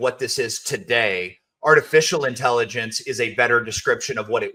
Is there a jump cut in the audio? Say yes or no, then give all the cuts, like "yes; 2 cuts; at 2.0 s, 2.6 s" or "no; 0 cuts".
no; 0 cuts